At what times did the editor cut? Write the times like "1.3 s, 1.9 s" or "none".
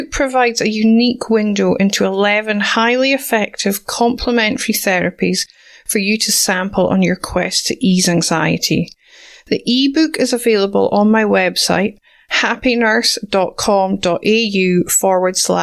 none